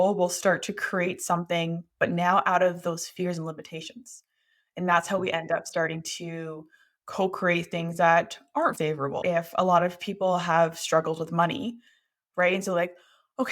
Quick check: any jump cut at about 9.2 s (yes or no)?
yes